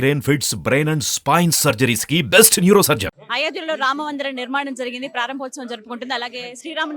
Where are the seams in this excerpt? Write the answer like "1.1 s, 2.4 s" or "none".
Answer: 3.1 s